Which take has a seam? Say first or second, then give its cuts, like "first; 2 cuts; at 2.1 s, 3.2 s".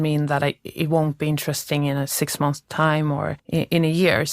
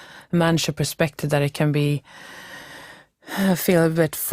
first; 1 cut; at 3.4 s